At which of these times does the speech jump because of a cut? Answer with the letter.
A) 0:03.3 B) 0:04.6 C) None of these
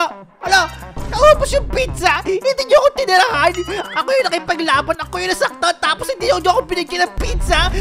C